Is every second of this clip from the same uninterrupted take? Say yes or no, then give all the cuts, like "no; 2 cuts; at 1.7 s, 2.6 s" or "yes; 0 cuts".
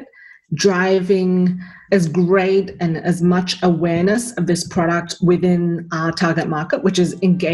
yes; 0 cuts